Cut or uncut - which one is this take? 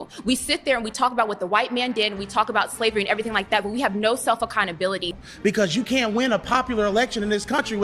cut